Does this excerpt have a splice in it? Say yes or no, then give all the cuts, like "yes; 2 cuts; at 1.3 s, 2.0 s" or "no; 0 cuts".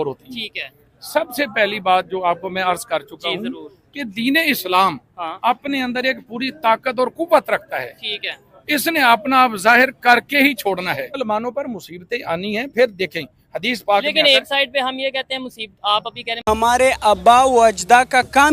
yes; 1 cut; at 16.3 s